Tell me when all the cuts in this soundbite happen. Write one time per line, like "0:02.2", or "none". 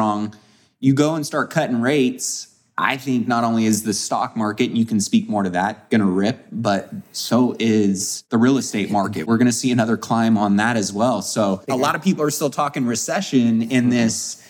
0:08.1
0:09.2
0:11.6